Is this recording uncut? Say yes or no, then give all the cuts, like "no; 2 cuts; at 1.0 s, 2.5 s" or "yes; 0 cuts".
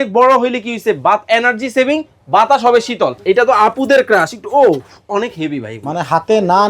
no; 1 cut; at 3.2 s